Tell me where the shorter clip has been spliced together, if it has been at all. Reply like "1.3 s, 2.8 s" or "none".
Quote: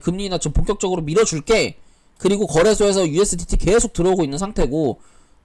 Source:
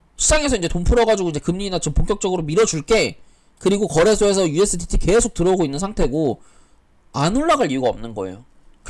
none